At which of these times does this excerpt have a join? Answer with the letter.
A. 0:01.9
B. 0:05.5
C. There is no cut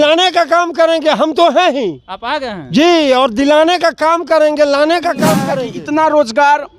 B